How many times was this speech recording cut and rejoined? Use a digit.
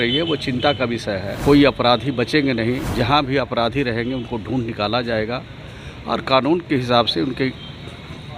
2